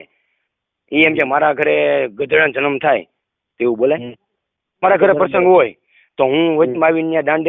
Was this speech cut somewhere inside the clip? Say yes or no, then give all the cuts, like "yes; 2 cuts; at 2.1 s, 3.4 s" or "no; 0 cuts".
yes; 1 cut; at 4.8 s